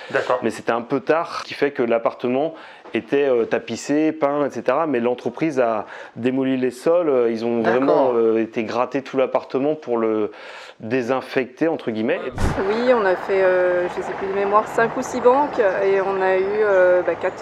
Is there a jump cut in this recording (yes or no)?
yes